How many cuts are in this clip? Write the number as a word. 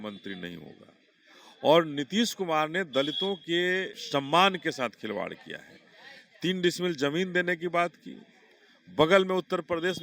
one